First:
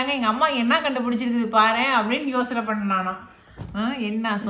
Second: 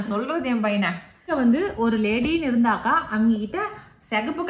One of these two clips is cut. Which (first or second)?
second